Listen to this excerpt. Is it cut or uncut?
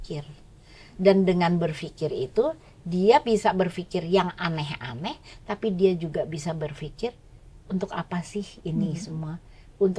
uncut